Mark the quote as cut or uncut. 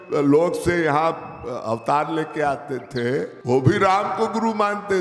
uncut